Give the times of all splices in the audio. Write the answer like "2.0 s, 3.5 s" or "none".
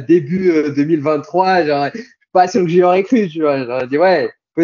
none